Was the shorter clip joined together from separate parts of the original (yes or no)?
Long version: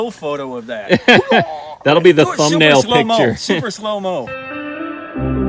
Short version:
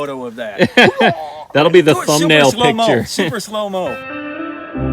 yes